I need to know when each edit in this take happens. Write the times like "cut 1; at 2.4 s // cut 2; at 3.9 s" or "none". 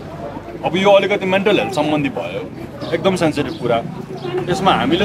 none